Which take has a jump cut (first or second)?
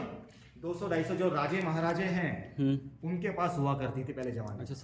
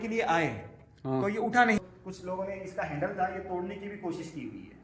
second